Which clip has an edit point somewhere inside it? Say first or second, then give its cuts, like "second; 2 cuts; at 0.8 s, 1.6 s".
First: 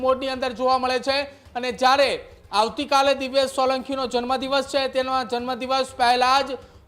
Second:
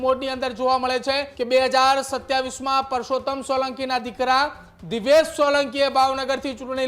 second; 1 cut; at 1.3 s